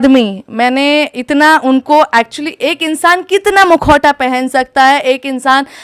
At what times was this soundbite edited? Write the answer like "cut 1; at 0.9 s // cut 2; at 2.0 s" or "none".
none